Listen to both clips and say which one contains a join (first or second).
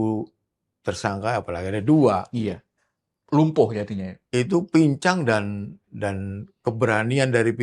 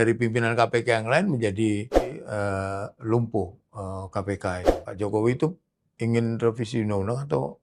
second